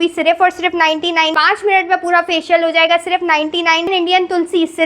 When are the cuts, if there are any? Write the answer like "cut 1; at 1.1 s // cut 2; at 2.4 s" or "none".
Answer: cut 1; at 1.3 s // cut 2; at 3.9 s